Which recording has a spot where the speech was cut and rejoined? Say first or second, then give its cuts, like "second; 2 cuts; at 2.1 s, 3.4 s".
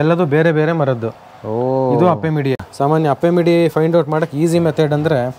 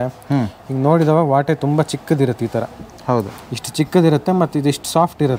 first; 1 cut; at 2.7 s